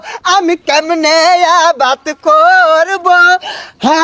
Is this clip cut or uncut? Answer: uncut